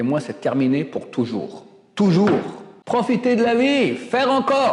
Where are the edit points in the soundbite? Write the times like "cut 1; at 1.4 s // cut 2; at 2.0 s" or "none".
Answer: cut 1; at 2.7 s